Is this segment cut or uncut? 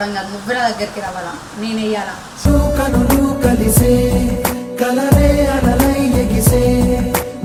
uncut